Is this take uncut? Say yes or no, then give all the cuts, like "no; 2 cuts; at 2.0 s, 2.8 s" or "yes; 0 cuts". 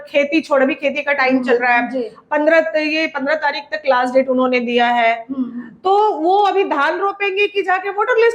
yes; 0 cuts